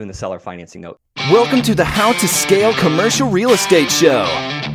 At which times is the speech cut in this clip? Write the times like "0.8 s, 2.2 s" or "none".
0.9 s